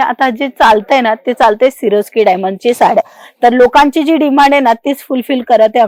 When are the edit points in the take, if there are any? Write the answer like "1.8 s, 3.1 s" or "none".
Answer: none